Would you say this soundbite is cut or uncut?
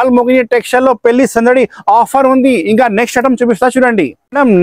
uncut